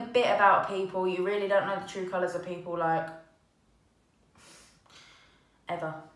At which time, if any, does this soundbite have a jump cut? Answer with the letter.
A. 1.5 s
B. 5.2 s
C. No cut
C